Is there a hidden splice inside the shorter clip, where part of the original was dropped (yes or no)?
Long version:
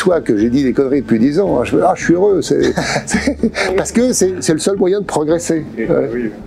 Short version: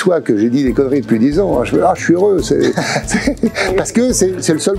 no